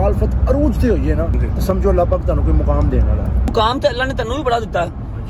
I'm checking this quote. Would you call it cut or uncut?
cut